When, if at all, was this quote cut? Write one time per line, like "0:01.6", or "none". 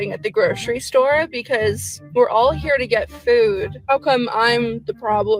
none